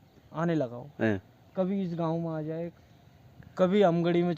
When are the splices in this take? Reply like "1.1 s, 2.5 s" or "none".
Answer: 2.7 s